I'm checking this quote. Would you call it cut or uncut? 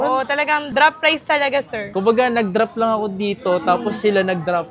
uncut